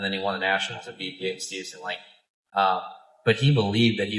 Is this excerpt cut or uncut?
uncut